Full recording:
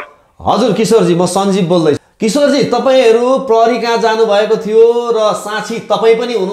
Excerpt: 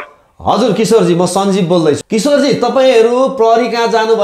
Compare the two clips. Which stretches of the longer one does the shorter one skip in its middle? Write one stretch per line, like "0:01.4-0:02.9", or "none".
0:02.1-0:02.2

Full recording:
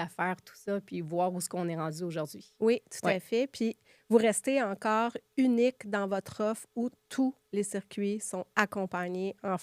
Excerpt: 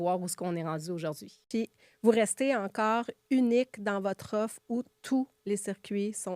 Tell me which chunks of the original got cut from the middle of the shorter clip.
0:02.6-0:03.5

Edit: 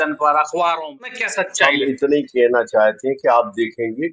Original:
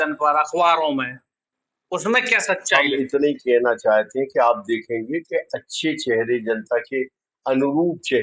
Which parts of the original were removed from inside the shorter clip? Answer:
0:01.2-0:02.3

